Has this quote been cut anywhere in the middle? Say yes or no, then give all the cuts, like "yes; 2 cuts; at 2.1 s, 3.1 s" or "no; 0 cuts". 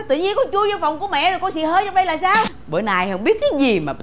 yes; 1 cut; at 2.6 s